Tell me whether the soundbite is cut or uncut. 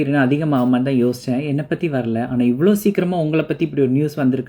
uncut